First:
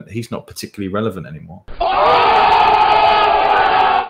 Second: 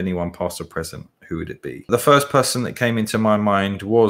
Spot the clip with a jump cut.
second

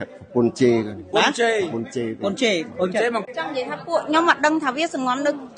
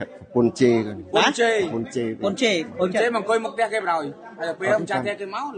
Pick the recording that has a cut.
first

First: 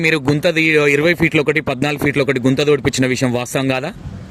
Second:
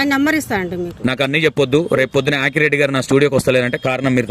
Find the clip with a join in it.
second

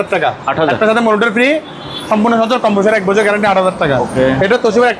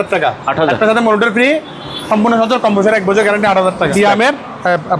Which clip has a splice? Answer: second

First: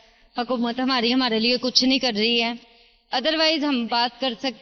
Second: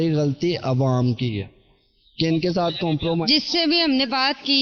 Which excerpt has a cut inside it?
second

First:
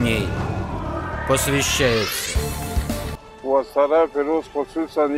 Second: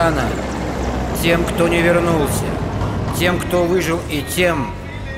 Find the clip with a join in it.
first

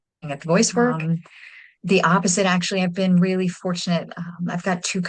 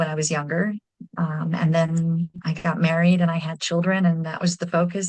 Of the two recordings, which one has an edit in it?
first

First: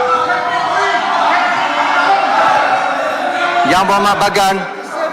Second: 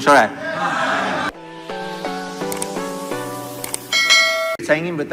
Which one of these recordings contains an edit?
second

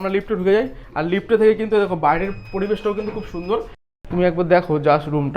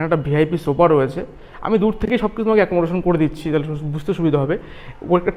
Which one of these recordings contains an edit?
first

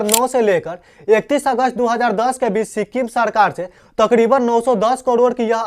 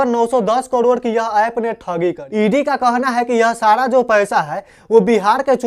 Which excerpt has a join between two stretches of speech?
second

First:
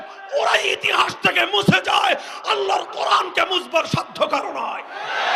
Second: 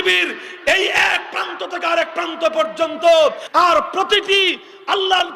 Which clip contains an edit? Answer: second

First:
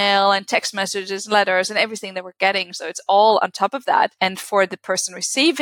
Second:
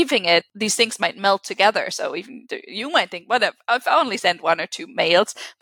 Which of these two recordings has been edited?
first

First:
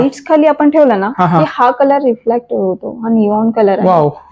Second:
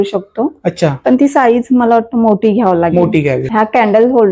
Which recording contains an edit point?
second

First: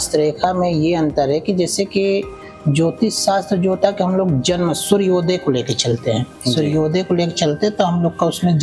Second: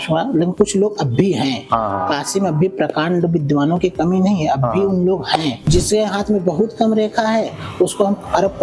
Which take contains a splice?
second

